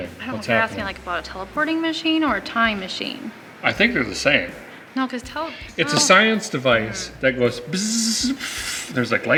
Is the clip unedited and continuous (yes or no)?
yes